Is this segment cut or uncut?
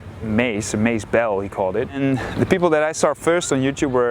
cut